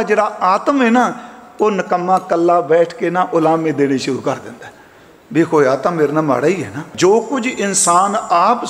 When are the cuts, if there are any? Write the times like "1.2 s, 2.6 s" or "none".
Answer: 6.8 s